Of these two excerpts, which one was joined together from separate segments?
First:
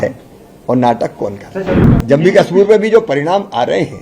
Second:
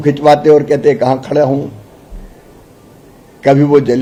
first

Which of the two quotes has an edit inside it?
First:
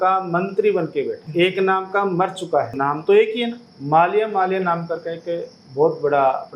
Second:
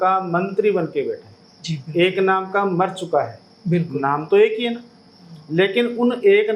first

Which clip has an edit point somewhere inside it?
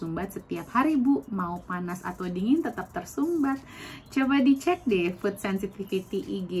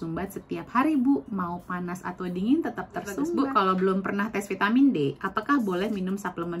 second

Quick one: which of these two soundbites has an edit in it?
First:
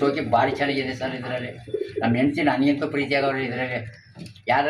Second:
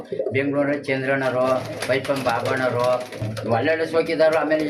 second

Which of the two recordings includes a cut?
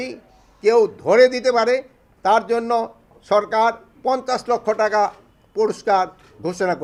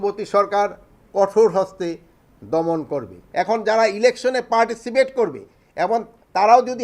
second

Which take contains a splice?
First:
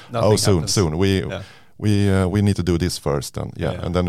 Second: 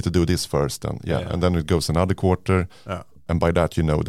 second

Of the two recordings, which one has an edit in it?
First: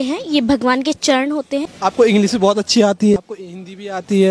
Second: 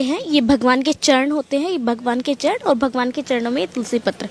first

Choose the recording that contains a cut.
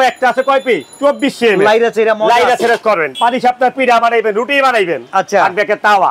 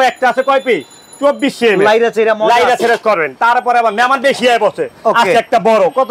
first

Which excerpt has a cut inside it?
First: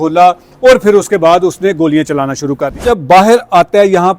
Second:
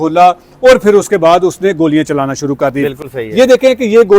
first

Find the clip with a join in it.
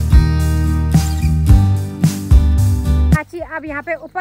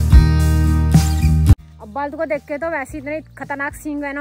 second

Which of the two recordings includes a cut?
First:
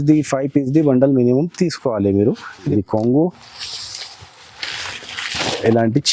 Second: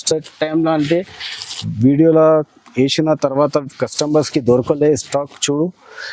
first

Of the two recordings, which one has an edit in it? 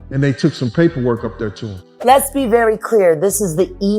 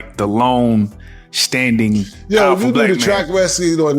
first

